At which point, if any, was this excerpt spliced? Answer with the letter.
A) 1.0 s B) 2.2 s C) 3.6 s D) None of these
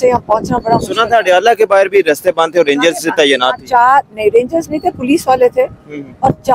D